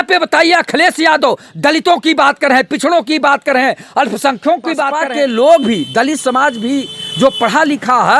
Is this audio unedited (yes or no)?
no